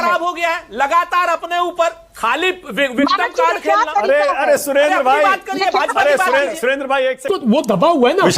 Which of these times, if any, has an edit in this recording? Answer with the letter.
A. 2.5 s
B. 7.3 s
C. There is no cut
B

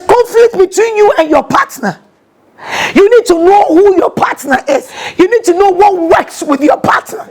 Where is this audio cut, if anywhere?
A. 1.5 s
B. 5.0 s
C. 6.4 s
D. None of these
B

